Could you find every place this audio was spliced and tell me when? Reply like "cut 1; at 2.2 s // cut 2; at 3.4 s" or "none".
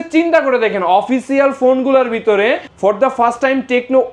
cut 1; at 2.7 s